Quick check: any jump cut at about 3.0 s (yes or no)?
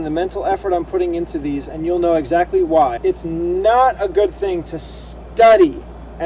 yes